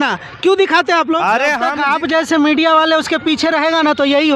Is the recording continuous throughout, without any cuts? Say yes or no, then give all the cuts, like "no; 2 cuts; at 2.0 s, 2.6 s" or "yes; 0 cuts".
no; 1 cut; at 1.7 s